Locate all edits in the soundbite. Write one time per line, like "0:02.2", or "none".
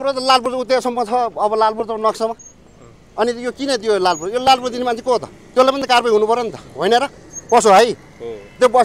none